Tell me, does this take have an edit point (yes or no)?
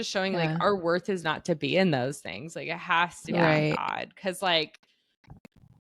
no